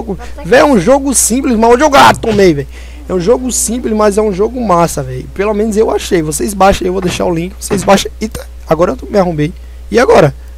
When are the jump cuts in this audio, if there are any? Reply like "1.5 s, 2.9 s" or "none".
none

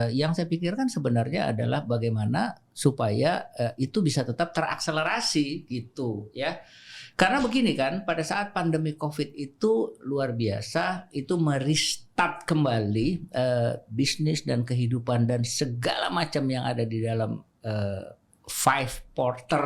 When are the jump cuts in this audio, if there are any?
none

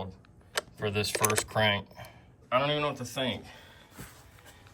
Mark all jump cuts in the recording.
2.4 s

